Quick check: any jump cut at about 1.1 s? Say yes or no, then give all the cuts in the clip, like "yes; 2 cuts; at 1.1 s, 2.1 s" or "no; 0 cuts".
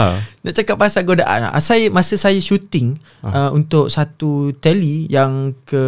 no; 0 cuts